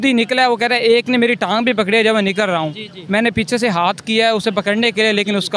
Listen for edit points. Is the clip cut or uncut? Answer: uncut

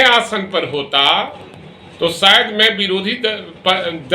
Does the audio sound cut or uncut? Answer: uncut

